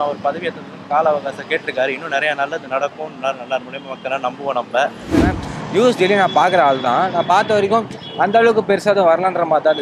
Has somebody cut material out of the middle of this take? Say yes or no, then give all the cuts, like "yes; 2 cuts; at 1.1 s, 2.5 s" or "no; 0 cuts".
yes; 1 cut; at 5.3 s